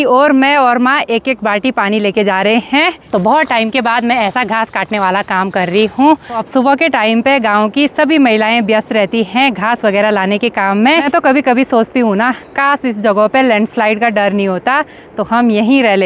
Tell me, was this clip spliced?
yes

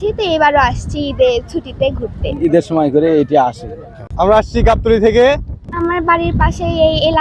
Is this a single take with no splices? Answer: no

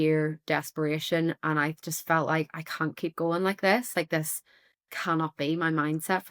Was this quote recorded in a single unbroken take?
yes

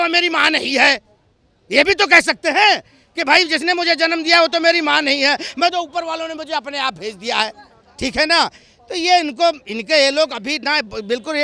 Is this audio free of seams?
yes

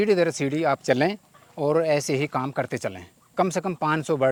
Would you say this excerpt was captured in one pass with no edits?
yes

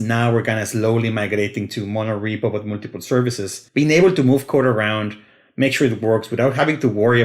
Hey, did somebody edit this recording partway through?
yes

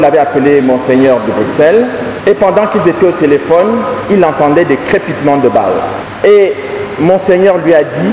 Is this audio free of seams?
no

